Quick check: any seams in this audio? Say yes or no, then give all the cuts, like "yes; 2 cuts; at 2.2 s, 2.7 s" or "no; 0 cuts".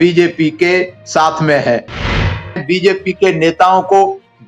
yes; 1 cut; at 2.4 s